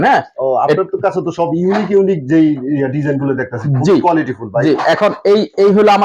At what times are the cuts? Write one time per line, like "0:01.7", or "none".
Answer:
none